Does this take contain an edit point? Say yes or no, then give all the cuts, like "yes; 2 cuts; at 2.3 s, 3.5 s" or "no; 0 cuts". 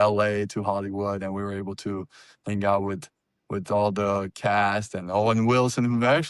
no; 0 cuts